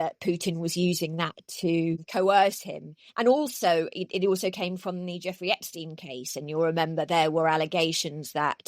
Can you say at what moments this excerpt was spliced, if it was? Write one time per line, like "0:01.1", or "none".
0:02.0